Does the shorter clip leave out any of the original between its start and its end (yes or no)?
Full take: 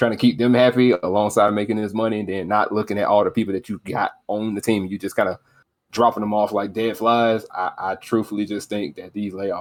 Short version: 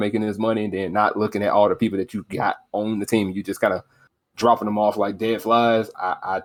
no